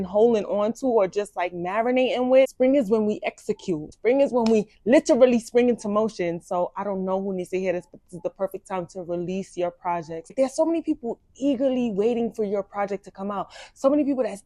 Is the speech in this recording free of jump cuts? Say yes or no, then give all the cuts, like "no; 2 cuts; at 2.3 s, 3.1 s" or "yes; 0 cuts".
no; 3 cuts; at 2.5 s, 3.9 s, 10.2 s